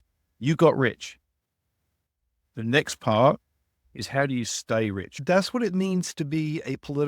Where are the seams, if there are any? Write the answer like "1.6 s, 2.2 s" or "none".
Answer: 5.2 s